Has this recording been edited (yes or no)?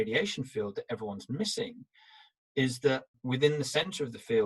no